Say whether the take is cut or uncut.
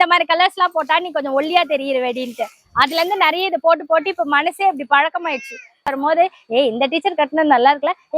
cut